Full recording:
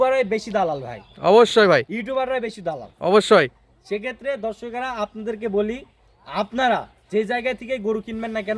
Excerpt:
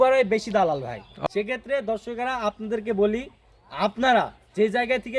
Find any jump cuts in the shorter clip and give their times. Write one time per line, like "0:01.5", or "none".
0:01.1